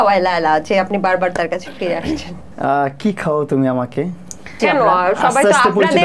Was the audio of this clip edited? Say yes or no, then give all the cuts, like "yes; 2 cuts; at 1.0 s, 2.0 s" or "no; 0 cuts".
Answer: yes; 2 cuts; at 2.4 s, 4.5 s